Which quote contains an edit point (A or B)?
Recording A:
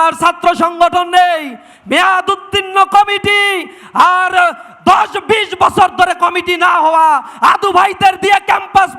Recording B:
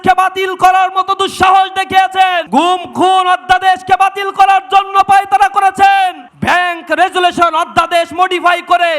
B